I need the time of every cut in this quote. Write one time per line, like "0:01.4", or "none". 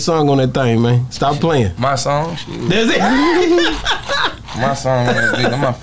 none